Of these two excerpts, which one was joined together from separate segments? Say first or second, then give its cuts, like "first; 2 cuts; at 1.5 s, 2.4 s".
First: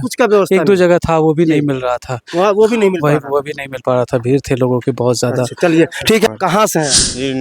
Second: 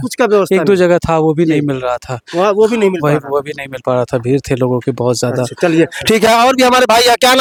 first; 1 cut; at 6.3 s